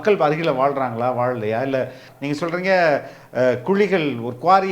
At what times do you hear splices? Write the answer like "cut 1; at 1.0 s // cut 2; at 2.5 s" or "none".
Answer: cut 1; at 2.1 s